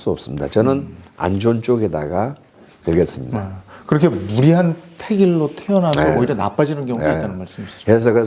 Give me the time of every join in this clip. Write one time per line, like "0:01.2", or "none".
none